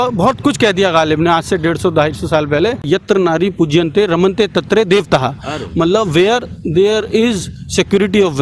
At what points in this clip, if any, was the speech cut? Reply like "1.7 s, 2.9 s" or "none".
2.9 s

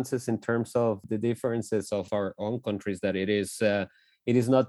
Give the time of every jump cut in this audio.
1.0 s, 2.1 s

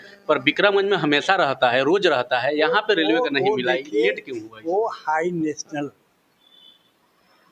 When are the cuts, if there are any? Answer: none

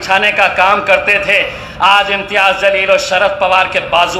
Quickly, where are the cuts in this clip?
none

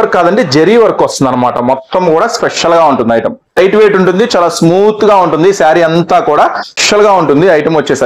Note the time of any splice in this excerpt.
3.6 s, 6.7 s

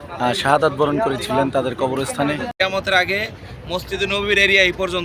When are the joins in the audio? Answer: 2.5 s

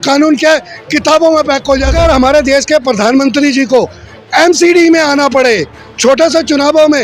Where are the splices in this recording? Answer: 1.9 s

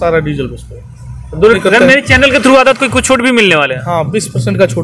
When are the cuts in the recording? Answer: 1.6 s

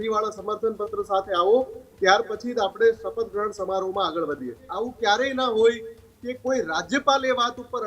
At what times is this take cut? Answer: 4.7 s

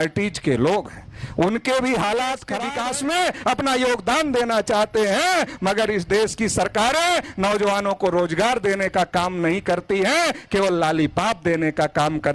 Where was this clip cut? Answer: 2.5 s

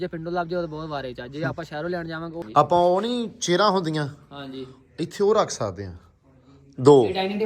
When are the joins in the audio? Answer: 2.3 s

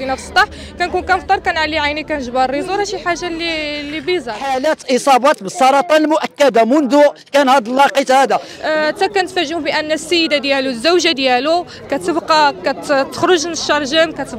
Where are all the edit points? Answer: 4.5 s, 8.5 s

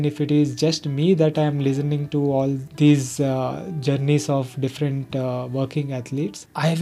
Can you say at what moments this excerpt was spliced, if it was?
none

